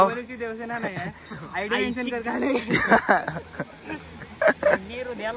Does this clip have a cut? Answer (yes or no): no